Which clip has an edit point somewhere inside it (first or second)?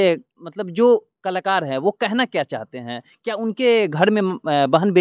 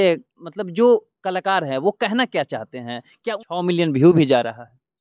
second